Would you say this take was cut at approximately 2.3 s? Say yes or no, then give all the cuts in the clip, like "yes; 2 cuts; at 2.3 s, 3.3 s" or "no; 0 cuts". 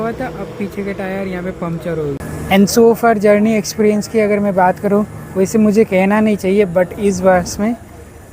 yes; 1 cut; at 2.3 s